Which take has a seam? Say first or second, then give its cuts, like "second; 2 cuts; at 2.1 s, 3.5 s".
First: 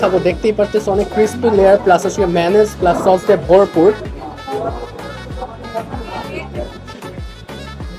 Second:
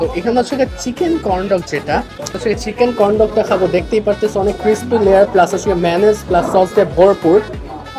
second; 1 cut; at 2.4 s